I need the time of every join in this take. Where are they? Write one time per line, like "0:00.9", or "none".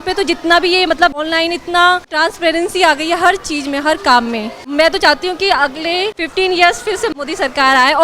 0:01.2
0:02.1
0:04.6
0:06.2
0:07.1

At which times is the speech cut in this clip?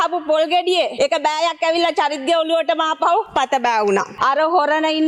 0:00.9
0:03.3
0:04.1

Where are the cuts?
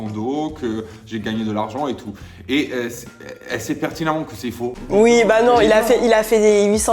0:04.8

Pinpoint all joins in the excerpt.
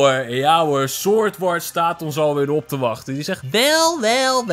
0:03.4

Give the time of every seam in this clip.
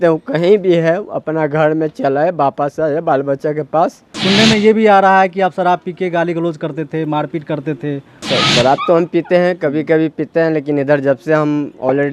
0:04.1
0:08.2

